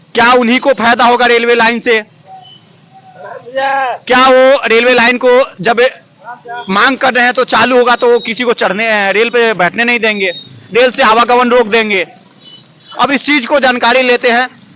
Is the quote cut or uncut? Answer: uncut